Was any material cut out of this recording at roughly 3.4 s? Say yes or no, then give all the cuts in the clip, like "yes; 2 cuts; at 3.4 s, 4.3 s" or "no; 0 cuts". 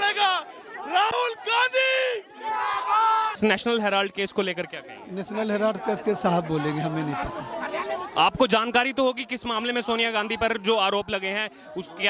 yes; 1 cut; at 3.4 s